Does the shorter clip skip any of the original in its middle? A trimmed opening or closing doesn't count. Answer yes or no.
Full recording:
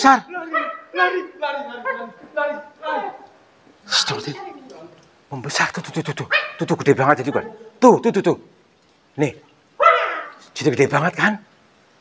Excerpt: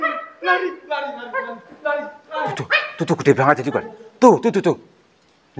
yes